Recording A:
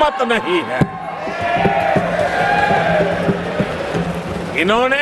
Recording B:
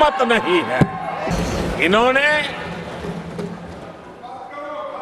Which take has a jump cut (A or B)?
B